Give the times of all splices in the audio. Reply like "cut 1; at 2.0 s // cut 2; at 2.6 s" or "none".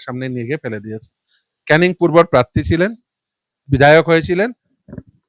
none